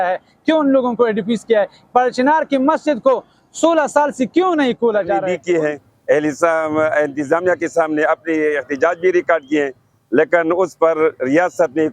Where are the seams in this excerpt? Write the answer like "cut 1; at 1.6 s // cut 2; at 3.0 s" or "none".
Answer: cut 1; at 5.3 s